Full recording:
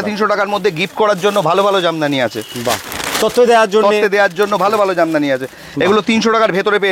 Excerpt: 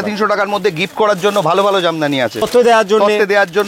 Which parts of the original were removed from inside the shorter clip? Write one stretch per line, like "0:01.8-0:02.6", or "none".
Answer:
0:02.5-0:03.3